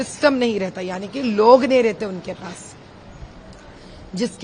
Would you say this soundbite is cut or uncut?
uncut